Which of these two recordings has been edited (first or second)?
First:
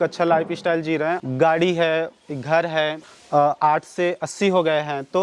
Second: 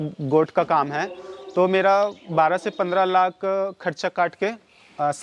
first